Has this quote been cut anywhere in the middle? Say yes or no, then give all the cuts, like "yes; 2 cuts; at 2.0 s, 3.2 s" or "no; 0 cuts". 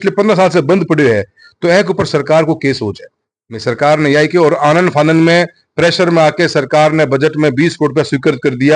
no; 0 cuts